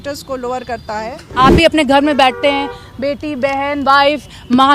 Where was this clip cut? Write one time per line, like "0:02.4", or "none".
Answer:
0:01.4